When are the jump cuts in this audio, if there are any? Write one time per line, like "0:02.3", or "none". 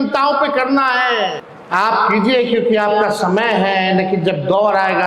0:01.5